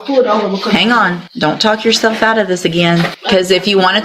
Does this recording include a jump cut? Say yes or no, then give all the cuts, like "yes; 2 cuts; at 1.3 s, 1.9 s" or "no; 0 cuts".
yes; 2 cuts; at 1.2 s, 3.2 s